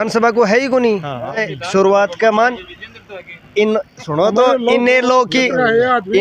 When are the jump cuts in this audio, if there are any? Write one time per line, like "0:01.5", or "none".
0:01.4